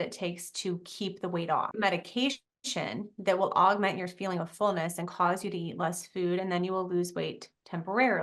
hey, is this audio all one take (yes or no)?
no